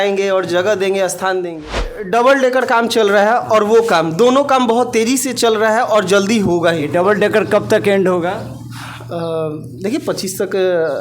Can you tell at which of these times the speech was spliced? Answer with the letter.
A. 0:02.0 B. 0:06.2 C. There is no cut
A